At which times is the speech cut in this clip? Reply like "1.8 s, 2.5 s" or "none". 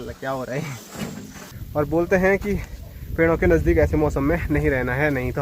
1.4 s